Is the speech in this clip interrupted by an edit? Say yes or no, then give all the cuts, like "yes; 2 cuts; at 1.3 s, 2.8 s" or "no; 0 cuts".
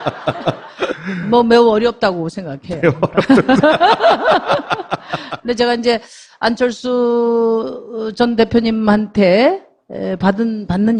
no; 0 cuts